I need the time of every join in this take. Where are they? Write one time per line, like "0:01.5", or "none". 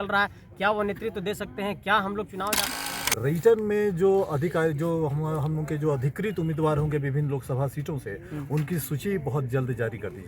0:02.8